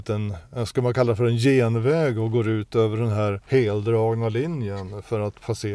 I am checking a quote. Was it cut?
yes; 1 cut; at 3.4 s

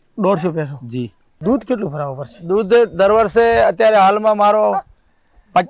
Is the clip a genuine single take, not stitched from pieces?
no; 1 cut; at 1.3 s

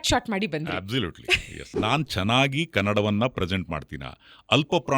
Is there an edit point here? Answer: yes; 1 cut; at 1.7 s

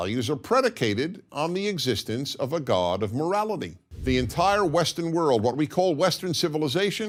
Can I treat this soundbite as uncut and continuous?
yes; 0 cuts

